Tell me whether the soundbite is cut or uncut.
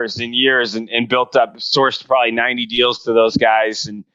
uncut